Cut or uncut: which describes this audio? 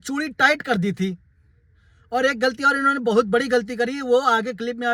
uncut